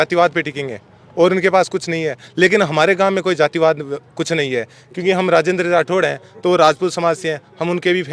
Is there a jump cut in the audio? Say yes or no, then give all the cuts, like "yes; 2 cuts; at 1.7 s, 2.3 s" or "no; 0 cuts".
no; 0 cuts